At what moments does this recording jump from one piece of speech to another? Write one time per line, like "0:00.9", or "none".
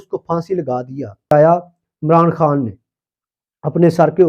0:01.3